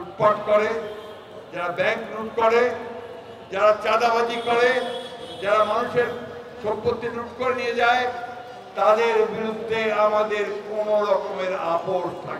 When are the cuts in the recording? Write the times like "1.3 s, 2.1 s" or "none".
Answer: none